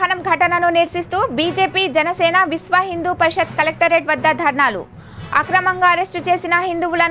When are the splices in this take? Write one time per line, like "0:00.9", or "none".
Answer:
none